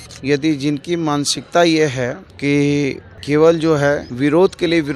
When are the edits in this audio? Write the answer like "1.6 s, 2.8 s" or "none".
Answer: 2.3 s, 3.1 s, 4.1 s